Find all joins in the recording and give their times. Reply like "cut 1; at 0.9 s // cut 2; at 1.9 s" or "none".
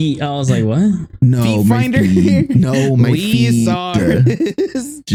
none